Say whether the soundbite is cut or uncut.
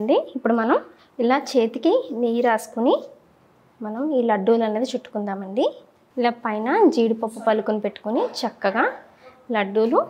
uncut